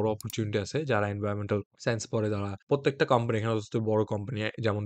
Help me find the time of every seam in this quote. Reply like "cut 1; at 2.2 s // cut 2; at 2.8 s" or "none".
none